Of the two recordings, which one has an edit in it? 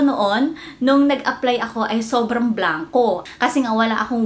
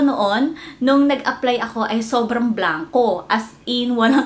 first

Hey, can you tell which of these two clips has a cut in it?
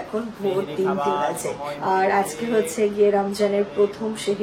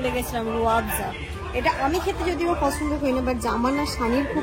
first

